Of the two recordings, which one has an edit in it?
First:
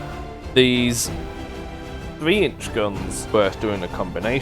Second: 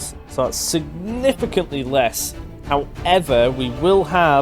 first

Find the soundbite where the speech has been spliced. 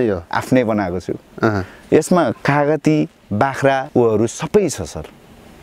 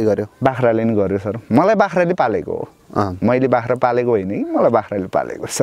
first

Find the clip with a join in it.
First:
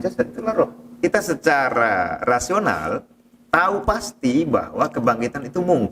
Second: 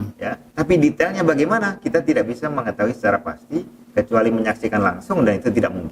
first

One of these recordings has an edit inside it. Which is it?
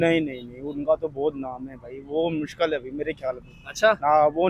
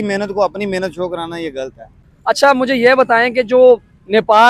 second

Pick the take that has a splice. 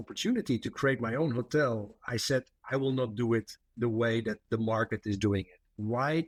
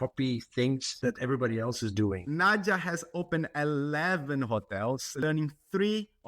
second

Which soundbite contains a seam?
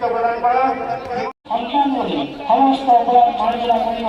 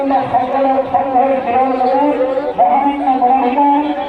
first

